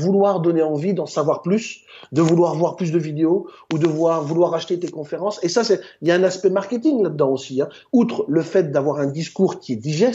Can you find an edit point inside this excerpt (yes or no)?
no